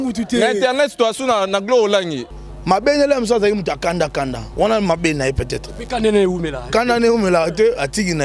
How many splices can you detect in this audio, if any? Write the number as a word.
one